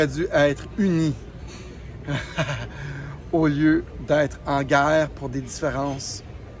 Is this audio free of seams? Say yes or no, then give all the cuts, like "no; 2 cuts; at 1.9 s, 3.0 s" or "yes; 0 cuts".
yes; 0 cuts